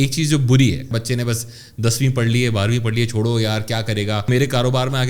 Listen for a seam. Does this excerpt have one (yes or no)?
yes